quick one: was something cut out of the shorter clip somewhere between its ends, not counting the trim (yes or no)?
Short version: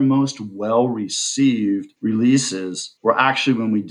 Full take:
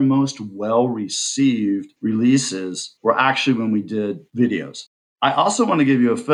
no